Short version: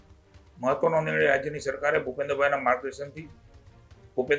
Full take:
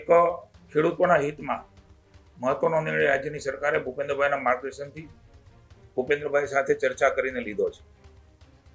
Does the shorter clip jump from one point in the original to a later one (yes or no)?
no